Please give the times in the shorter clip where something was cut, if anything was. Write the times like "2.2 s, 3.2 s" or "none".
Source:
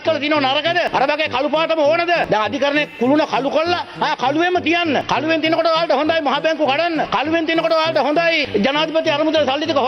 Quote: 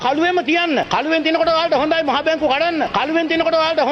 none